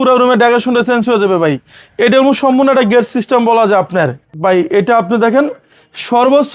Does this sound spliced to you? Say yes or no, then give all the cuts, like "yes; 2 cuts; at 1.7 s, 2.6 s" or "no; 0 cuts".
yes; 1 cut; at 4.2 s